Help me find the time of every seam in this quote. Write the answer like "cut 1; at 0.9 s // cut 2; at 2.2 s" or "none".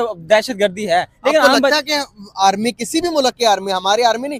none

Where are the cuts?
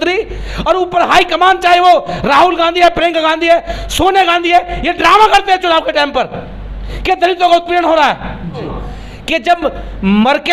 cut 1; at 8.7 s

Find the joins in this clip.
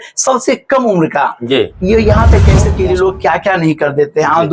cut 1; at 2.7 s

